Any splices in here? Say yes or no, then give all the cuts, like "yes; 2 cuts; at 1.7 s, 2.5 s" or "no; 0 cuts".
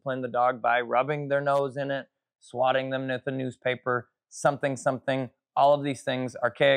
no; 0 cuts